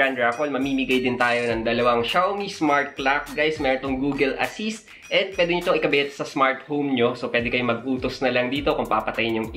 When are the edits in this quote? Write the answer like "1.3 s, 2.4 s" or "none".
none